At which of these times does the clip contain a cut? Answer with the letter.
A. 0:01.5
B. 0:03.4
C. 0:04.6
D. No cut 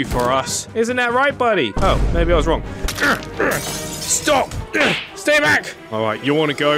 C